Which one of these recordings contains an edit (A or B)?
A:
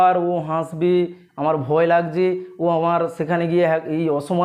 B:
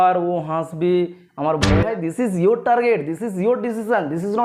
B